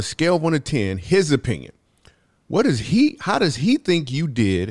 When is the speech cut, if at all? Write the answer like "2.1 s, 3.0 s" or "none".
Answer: none